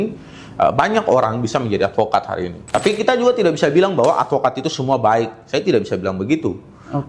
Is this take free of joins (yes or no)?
no